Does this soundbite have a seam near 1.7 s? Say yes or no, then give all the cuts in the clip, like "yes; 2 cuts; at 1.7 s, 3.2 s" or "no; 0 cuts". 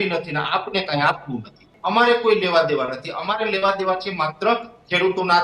yes; 1 cut; at 1.7 s